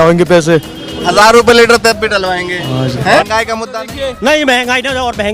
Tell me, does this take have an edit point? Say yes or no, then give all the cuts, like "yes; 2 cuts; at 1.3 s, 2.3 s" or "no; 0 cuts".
yes; 1 cut; at 3.3 s